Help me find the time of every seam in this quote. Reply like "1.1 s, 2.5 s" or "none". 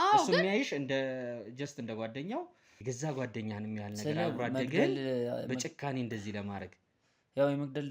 2.6 s